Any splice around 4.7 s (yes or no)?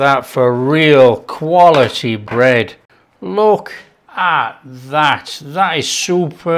no